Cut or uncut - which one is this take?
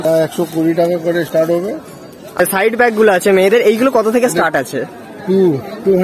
cut